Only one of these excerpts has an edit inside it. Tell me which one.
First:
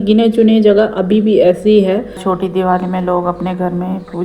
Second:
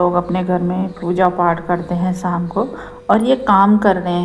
first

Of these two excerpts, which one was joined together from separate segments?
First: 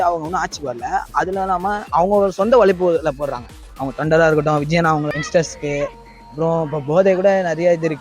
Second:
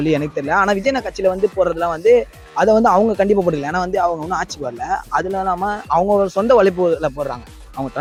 first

